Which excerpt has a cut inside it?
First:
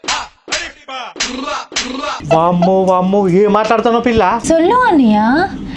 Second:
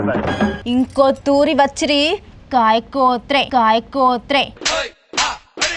first; 1 cut; at 2.2 s

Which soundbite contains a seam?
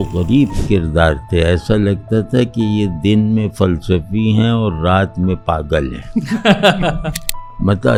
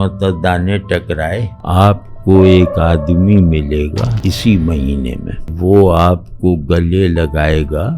second; 3 cuts; at 1.5 s, 4.1 s, 5.5 s

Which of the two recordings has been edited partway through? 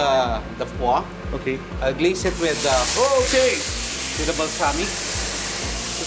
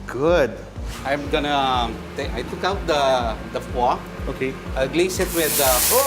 second; 1 cut; at 0.9 s

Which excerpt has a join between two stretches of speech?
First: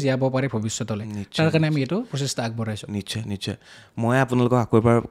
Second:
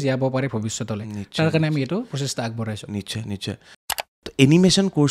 second; 1 cut; at 3.9 s

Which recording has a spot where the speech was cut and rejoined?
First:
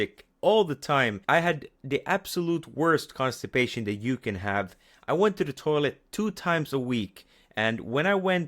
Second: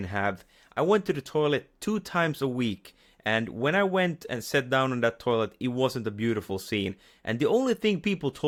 first; 1 cut; at 1.2 s

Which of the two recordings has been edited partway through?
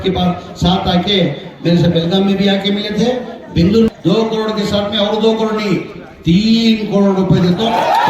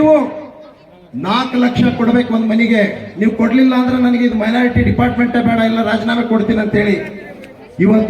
first; 1 cut; at 3.9 s

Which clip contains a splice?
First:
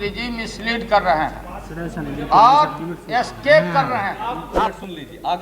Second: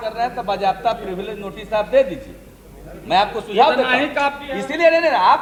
first; 1 cut; at 4.5 s

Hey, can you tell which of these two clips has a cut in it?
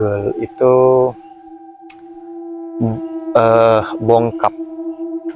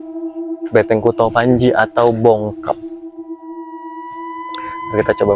second; 2 cuts; at 2.7 s, 4.3 s

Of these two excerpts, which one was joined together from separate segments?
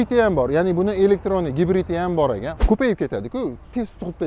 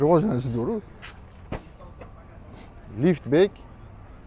first; 1 cut; at 2.5 s

